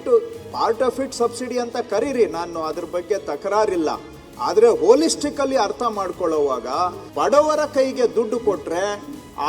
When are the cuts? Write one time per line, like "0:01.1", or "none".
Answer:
0:07.0